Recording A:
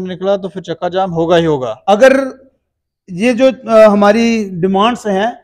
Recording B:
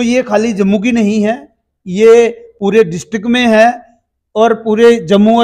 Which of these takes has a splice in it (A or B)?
A